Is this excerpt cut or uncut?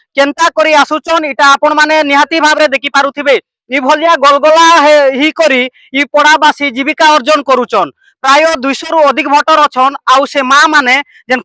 uncut